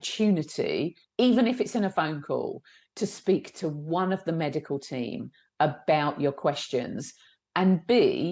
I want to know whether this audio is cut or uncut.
uncut